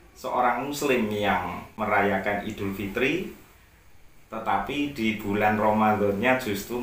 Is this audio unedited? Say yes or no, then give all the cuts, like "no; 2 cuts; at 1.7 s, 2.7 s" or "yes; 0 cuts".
no; 1 cut; at 1.7 s